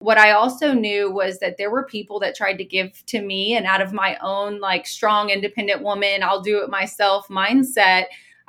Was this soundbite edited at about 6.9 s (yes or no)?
no